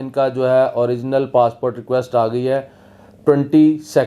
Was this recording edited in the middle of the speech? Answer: no; 0 cuts

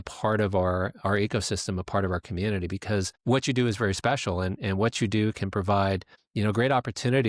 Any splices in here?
no; 0 cuts

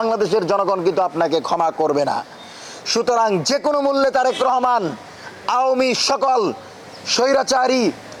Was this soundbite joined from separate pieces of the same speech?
no; 0 cuts

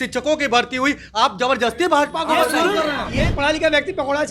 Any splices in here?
yes; 1 cut; at 3.1 s

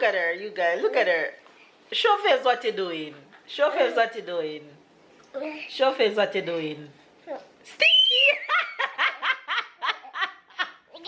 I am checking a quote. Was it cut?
no; 0 cuts

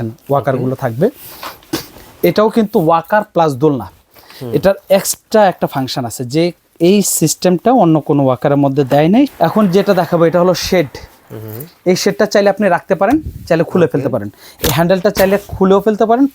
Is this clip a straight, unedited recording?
no; 1 cut; at 9.3 s

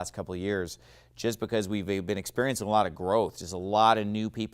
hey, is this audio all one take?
no; 1 cut; at 1.1 s

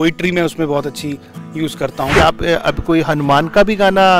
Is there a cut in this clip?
yes; 1 cut; at 2.1 s

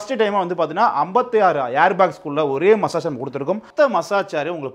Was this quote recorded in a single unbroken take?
no; 1 cut; at 3.7 s

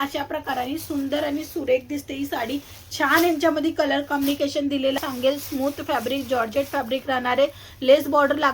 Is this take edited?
yes; 1 cut; at 5.0 s

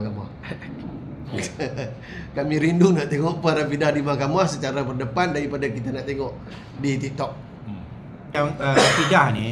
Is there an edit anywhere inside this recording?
yes; 1 cut; at 8.3 s

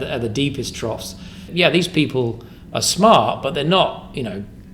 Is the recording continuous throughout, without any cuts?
no; 1 cut; at 1.5 s

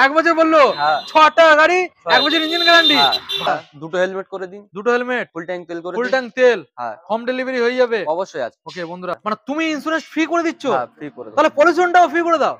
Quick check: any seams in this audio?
yes; 2 cuts; at 3.5 s, 9.2 s

